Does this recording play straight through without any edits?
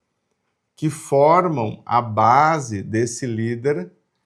yes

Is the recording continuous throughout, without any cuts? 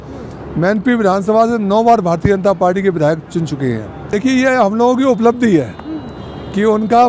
no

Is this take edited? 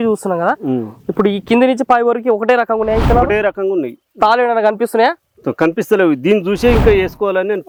no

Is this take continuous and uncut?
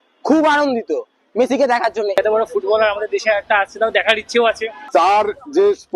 no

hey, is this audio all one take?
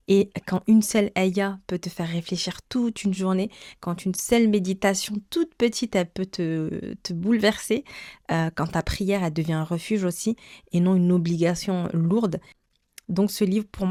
yes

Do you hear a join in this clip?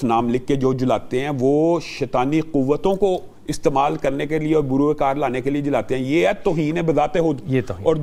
no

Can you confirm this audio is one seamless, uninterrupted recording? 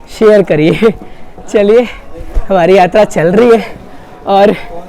yes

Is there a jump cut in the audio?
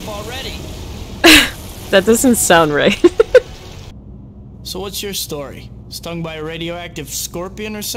yes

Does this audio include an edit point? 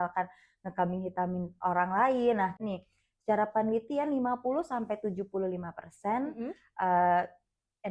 yes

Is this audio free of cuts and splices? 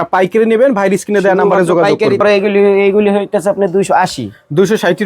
no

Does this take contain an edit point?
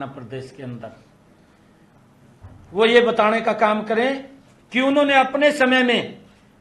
no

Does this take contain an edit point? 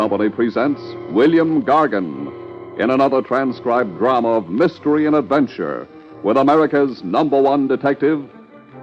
yes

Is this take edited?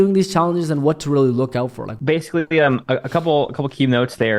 yes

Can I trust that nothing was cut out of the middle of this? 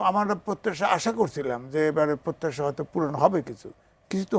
yes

